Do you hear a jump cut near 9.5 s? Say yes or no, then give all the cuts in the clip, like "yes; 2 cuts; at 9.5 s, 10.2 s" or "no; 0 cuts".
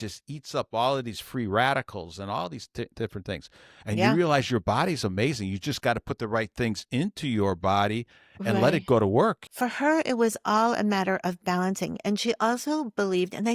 yes; 1 cut; at 9.5 s